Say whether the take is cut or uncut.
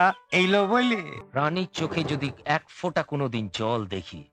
cut